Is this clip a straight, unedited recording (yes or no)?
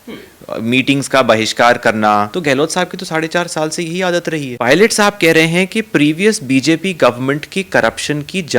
no